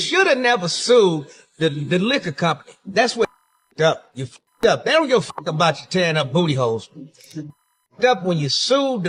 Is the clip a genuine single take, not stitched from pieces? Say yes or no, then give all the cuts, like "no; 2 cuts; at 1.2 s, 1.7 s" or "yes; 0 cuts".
yes; 0 cuts